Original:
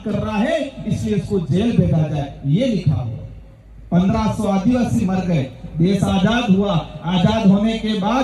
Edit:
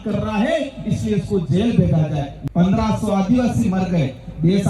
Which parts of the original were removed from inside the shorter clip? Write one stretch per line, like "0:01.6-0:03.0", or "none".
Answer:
0:02.3-0:03.7